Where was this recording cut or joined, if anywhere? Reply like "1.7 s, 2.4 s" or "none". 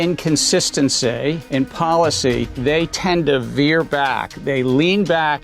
1.4 s, 2.5 s, 4.3 s